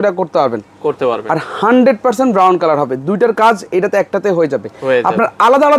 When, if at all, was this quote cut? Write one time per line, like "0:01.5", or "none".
none